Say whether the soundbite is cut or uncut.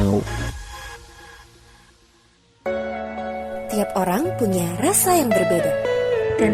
cut